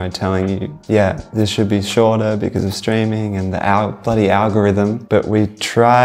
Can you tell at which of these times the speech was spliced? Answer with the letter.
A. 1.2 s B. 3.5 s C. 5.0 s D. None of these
C